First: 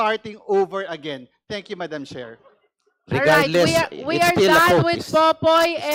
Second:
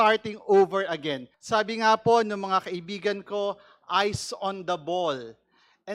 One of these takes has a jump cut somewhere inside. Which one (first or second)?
second